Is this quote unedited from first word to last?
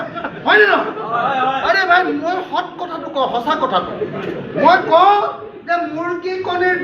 yes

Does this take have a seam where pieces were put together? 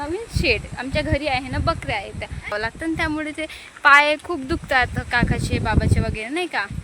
yes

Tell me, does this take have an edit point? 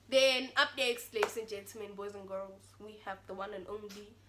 no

